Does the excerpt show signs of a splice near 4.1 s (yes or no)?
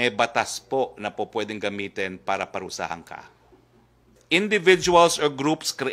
yes